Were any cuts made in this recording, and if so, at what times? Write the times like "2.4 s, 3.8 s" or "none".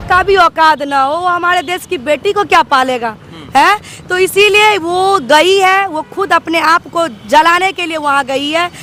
none